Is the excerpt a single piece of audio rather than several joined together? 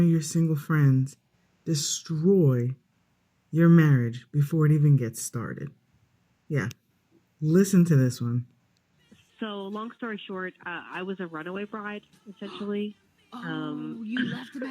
no; 1 cut; at 10.4 s

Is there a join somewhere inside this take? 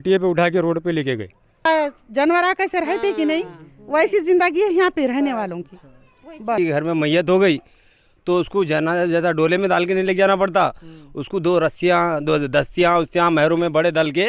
yes; 2 cuts; at 1.7 s, 6.6 s

